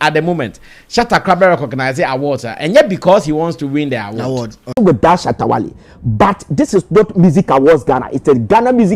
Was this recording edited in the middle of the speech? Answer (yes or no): yes